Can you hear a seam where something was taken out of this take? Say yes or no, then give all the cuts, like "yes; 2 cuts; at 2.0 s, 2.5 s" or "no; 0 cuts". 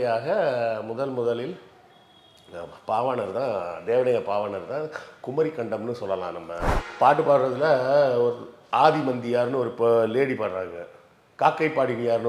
yes; 1 cut; at 6.6 s